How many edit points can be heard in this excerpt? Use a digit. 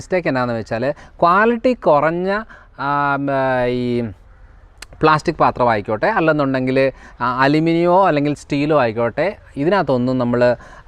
0